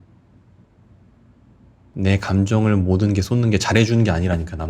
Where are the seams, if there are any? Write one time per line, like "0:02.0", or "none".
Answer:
0:01.9